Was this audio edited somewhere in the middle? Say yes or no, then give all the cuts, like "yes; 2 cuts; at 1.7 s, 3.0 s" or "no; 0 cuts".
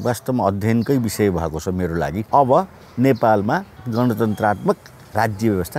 yes; 2 cuts; at 2.2 s, 3.8 s